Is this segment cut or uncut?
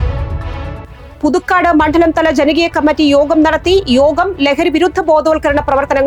uncut